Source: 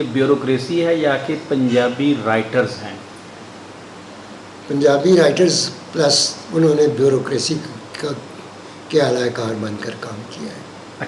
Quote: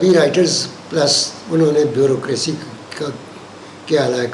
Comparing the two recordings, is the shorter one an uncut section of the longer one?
yes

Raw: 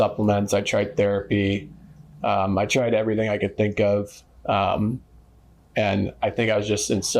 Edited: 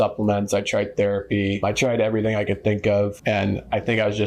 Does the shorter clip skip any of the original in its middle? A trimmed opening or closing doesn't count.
yes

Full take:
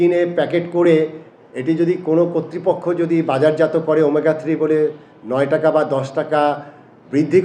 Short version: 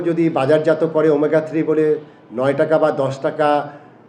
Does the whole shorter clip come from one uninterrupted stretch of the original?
yes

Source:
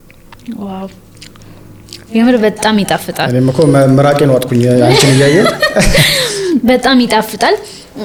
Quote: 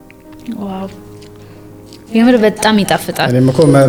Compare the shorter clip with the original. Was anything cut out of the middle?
no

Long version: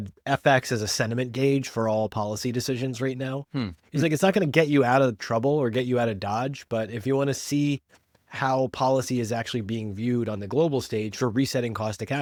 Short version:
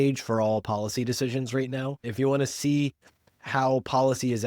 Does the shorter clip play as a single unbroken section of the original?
no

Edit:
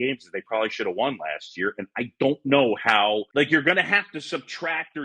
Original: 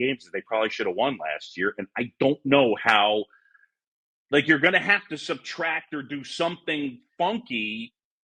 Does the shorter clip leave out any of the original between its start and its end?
yes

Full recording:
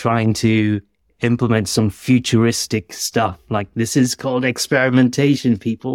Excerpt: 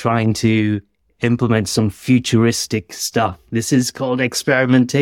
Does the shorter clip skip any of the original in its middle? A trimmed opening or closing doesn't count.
yes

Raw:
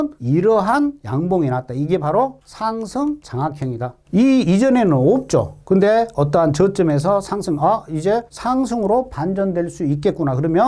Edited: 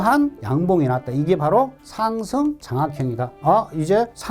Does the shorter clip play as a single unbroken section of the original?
no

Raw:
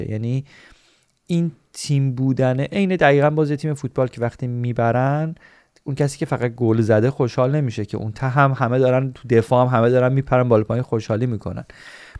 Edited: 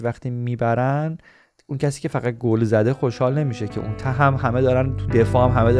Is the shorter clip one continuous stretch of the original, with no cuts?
yes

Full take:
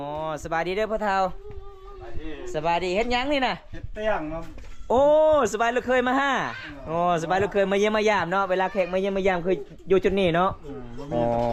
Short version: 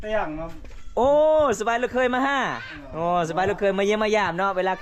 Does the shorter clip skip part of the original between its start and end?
no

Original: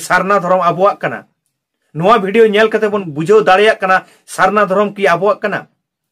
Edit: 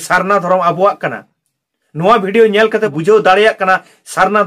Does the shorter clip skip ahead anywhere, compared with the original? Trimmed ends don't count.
yes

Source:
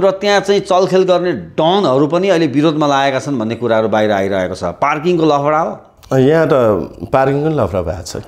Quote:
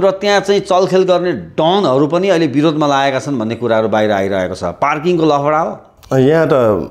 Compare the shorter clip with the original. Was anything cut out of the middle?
no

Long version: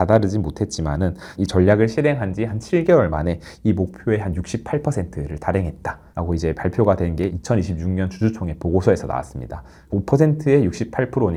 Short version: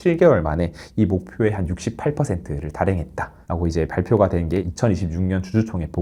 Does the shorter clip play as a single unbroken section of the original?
yes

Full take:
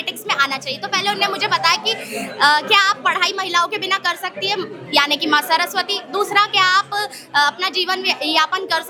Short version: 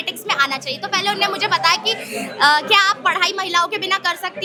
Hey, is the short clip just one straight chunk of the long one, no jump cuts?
yes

